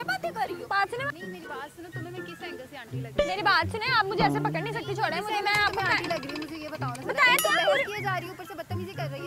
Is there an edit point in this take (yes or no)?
yes